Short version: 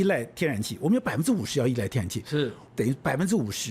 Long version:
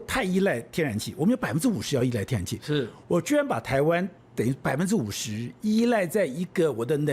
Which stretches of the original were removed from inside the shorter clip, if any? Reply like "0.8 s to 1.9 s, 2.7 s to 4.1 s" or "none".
3.0 s to 4.2 s